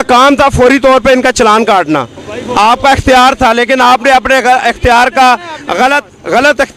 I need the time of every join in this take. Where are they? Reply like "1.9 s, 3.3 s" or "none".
none